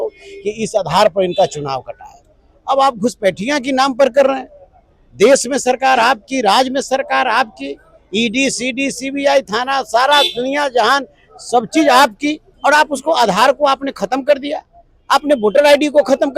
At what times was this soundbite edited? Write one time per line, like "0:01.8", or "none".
0:12.5